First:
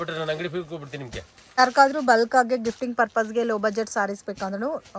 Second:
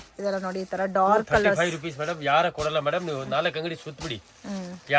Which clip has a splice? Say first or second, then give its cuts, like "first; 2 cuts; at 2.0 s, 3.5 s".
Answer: first; 1 cut; at 1.6 s